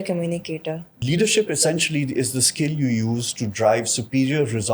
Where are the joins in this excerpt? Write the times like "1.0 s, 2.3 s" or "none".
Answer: 0.9 s